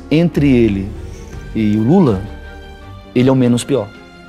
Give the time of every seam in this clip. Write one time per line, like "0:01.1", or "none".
none